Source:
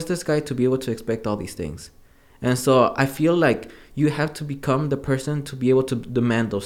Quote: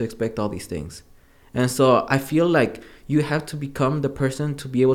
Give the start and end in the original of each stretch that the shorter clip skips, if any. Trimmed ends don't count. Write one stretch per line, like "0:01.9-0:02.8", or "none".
none